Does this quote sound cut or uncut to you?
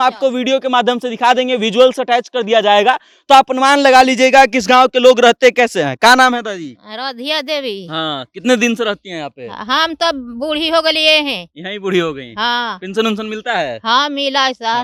uncut